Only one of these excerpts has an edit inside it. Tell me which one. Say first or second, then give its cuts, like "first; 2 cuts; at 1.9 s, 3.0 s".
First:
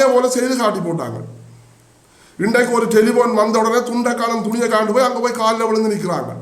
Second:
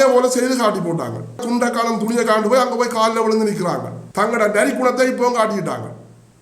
second; 2 cuts; at 1.4 s, 4.0 s